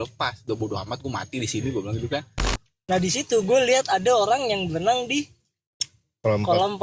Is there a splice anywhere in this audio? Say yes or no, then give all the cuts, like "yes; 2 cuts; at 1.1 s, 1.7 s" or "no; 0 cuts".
yes; 1 cut; at 2.3 s